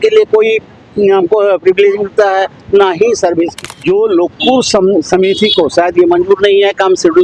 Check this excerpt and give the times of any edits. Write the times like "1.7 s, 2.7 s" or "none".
3.7 s